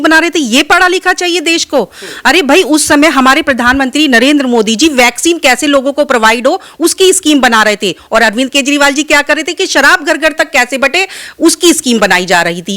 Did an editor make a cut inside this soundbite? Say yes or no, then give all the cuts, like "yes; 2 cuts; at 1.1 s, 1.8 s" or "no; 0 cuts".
no; 0 cuts